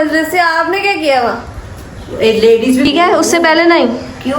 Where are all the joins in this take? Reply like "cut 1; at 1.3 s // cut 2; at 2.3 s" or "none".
cut 1; at 2.8 s